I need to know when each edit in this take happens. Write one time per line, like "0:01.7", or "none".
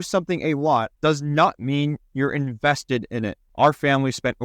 0:00.9
0:03.4